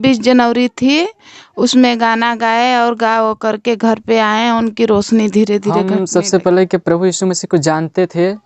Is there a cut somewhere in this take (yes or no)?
yes